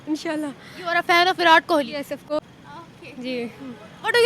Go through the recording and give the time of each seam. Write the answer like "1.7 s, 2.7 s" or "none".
2.4 s